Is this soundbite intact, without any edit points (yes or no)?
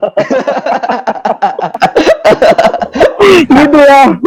yes